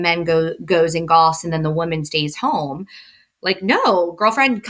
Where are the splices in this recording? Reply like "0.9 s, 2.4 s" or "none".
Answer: none